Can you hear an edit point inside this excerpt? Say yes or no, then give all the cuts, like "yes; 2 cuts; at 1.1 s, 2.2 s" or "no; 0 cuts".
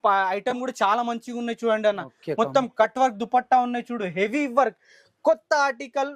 no; 0 cuts